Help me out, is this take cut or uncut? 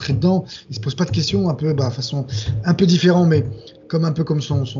uncut